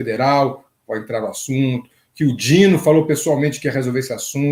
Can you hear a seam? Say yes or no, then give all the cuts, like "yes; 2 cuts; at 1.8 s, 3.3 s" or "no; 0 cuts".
no; 0 cuts